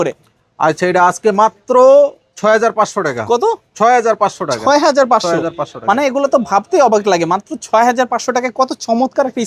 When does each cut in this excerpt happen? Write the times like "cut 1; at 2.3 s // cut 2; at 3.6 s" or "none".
none

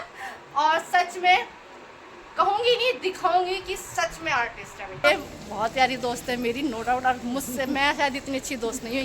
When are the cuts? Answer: cut 1; at 5.0 s

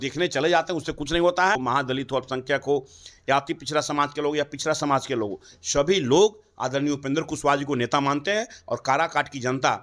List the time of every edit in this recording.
cut 1; at 1.6 s

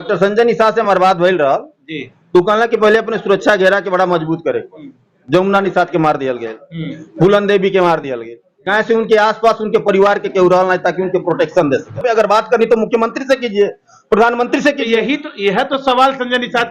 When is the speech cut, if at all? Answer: cut 1; at 12.0 s

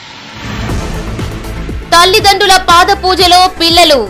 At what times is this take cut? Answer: cut 1; at 1.4 s

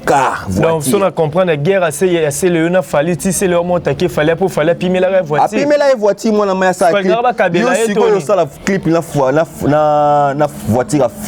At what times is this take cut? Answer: none

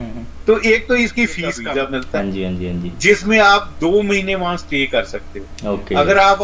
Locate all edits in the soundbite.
cut 1; at 1.6 s

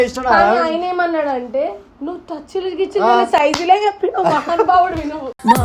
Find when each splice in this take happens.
none

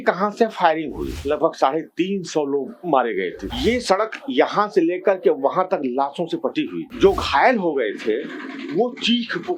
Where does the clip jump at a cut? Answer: cut 1; at 1.1 s // cut 2; at 3.4 s // cut 3; at 6.8 s

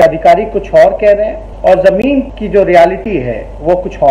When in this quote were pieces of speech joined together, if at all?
cut 1; at 1.4 s // cut 2; at 2.4 s

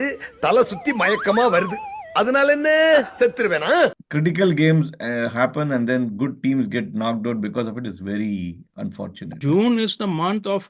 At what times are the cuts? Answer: cut 1; at 4.1 s // cut 2; at 9.3 s

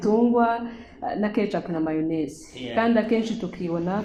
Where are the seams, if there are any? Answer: none

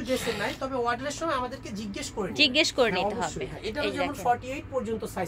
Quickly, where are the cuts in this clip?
none

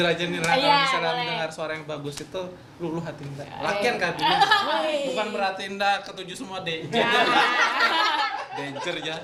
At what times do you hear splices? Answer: none

